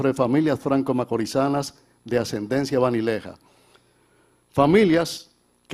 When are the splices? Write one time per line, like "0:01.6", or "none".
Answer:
none